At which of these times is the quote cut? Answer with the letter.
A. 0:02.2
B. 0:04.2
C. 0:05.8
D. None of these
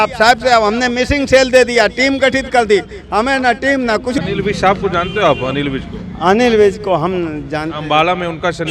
B